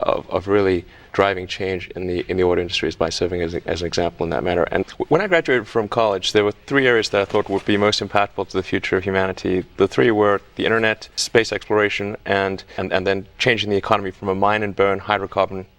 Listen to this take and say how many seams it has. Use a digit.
2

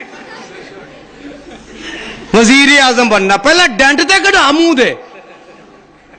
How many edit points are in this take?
1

